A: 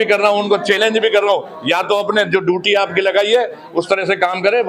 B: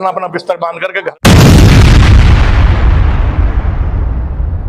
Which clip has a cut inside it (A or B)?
B